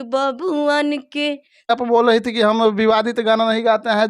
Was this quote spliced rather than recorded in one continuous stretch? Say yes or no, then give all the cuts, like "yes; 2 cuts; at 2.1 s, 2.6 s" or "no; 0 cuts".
yes; 1 cut; at 1.7 s